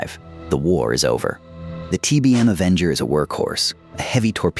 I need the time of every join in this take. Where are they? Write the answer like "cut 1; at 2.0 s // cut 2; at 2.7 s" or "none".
cut 1; at 1.7 s